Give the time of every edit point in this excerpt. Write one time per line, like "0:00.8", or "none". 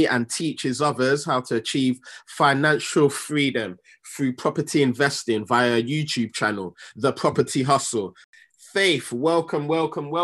0:08.2